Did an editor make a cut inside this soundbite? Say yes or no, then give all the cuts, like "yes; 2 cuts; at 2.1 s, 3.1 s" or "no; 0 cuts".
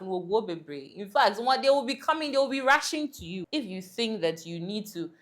yes; 1 cut; at 3.3 s